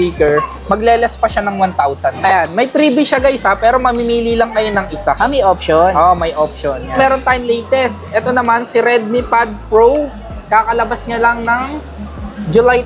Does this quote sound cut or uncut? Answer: cut